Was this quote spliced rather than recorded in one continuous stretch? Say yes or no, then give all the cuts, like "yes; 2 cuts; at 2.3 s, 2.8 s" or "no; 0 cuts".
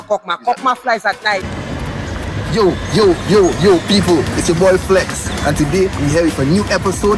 yes; 1 cut; at 1.5 s